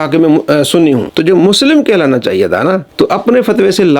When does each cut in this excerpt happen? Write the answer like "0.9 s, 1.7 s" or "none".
1.1 s, 2.9 s